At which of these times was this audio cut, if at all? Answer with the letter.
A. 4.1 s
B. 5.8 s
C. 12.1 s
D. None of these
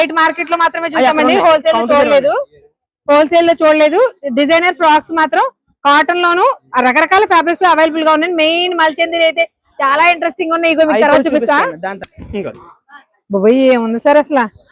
C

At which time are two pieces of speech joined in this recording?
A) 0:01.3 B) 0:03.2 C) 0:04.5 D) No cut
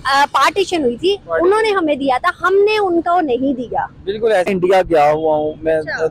C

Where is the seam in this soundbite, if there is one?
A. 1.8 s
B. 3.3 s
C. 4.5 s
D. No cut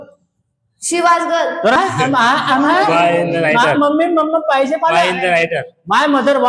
A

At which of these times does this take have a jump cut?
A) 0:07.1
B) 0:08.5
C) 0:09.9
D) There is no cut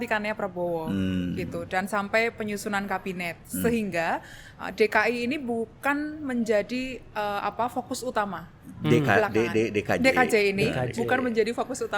D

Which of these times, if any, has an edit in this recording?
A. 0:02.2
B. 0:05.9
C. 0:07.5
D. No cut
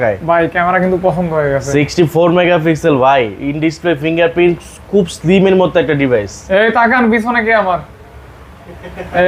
D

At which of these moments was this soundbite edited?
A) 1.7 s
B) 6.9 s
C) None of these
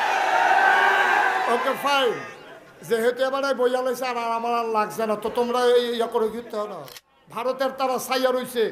B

